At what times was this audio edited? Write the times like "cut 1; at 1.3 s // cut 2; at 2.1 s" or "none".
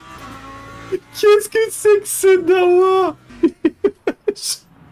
cut 1; at 3.3 s